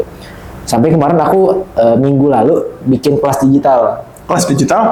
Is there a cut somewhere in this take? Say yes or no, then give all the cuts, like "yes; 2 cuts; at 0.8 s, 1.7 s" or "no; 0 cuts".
no; 0 cuts